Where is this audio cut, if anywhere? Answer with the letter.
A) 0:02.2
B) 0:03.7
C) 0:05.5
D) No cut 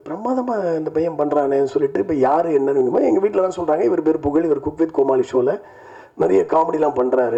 D